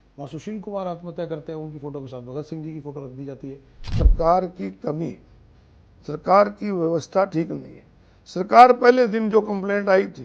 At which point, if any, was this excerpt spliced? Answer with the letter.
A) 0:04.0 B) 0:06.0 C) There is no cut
A